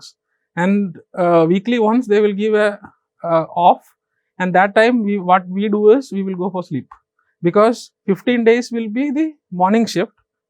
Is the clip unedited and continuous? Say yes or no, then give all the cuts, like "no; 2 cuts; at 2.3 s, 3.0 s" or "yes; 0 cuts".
yes; 0 cuts